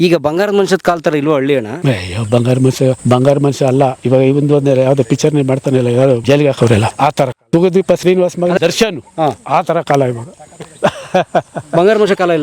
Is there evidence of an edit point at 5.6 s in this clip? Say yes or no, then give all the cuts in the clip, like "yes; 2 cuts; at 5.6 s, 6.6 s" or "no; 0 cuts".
no; 1 cut; at 8.6 s